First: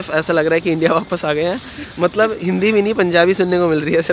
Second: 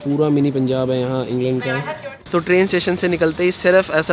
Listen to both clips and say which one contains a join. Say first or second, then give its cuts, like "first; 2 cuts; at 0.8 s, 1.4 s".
second; 1 cut; at 1.9 s